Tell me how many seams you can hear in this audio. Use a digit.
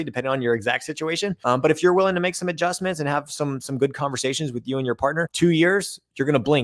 2